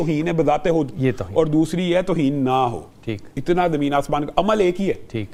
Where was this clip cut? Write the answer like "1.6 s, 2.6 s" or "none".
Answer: none